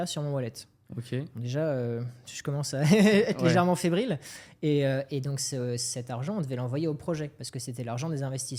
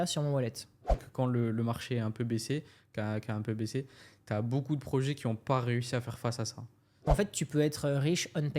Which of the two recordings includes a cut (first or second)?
second